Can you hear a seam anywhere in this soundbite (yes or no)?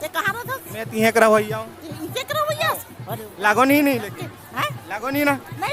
no